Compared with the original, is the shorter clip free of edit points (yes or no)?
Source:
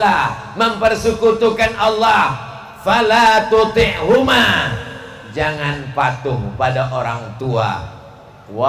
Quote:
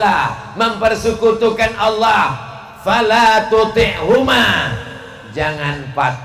yes